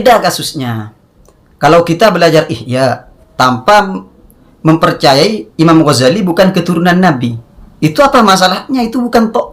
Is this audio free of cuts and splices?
yes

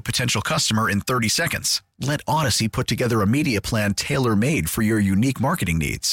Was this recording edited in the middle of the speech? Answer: no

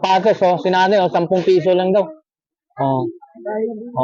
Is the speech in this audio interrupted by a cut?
no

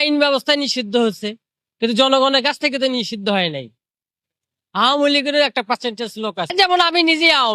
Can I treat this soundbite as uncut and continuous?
no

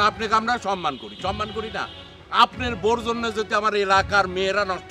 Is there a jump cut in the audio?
no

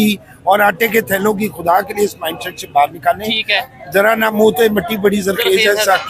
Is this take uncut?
yes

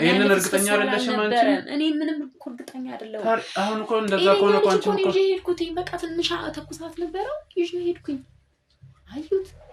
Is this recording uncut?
yes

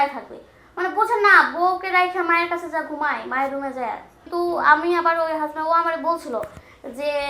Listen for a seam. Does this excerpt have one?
yes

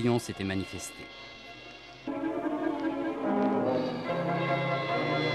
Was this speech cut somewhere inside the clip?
no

